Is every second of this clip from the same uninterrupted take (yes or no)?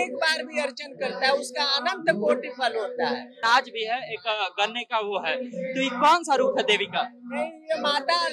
no